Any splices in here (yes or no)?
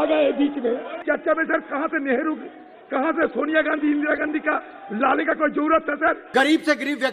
yes